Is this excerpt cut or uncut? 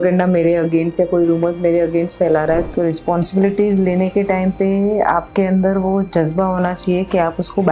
cut